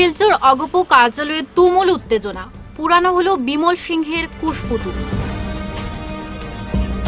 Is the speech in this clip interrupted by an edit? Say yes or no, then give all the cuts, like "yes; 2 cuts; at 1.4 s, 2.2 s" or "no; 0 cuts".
no; 0 cuts